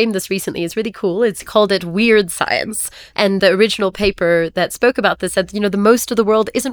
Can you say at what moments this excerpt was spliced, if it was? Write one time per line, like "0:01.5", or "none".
0:01.4
0:03.4